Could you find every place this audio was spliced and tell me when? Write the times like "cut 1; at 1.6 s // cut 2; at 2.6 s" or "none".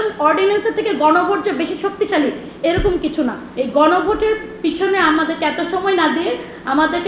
cut 1; at 3.5 s